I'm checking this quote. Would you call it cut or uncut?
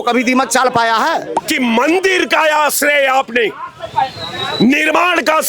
cut